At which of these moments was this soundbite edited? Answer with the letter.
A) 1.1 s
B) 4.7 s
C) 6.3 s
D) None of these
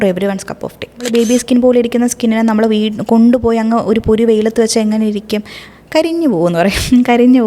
A